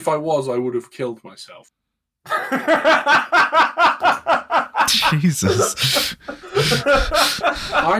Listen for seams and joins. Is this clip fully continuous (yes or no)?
yes